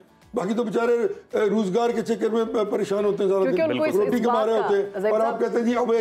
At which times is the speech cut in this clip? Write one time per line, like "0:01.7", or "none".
none